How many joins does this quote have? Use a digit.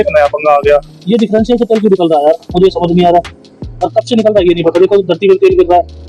1